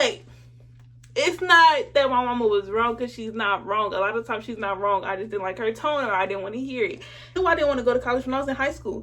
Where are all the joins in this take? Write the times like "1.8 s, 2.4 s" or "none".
7.3 s

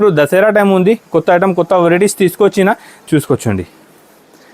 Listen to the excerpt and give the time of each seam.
2.9 s

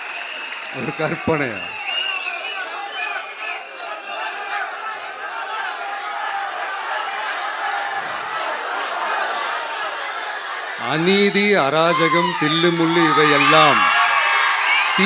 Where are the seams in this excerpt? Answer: none

